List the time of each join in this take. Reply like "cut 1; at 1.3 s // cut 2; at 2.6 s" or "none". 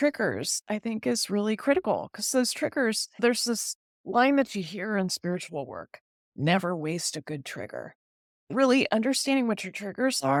none